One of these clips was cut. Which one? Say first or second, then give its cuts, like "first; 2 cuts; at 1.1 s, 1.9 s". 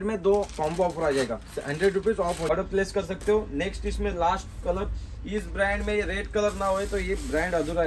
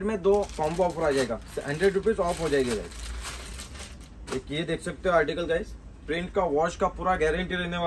first; 1 cut; at 2.5 s